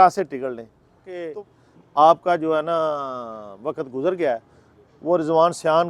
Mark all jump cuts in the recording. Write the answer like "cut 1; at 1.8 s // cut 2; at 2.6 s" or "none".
cut 1; at 1.2 s